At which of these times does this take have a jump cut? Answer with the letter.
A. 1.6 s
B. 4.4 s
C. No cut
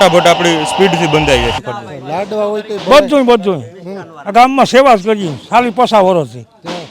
A